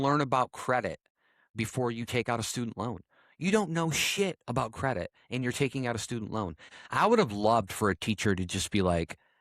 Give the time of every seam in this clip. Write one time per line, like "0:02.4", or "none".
0:01.5
0:06.7